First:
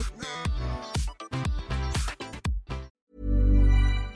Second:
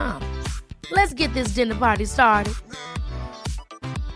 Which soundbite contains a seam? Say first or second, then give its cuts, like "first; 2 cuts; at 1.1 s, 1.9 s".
first; 1 cut; at 2.9 s